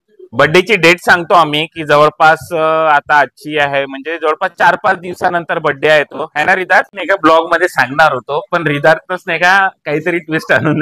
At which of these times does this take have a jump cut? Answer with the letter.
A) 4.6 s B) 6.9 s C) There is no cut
B